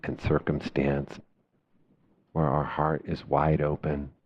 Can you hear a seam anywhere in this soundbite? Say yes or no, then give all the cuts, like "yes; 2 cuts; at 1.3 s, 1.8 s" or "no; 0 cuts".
yes; 1 cut; at 1.2 s